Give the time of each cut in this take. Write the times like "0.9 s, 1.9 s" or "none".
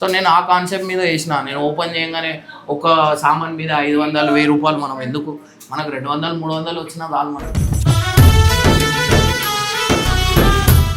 none